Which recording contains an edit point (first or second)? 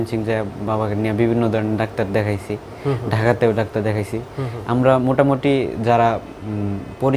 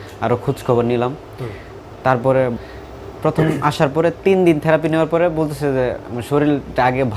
second